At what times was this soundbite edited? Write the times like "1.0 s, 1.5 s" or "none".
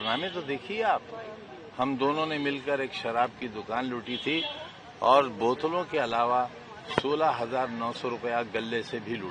none